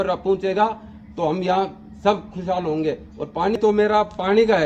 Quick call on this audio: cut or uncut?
cut